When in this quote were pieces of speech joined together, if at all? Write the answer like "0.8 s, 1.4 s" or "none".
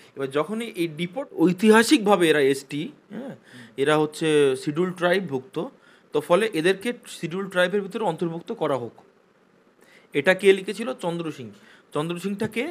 1.3 s